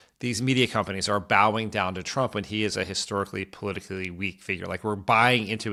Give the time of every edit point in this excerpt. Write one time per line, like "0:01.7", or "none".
none